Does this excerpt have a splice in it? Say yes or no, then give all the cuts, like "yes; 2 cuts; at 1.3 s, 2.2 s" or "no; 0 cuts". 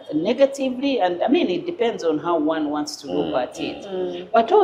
no; 0 cuts